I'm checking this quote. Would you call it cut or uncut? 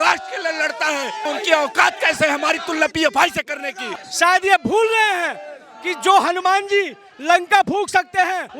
cut